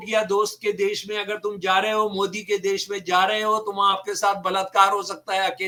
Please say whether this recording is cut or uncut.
uncut